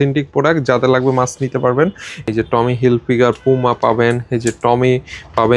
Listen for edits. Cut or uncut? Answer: cut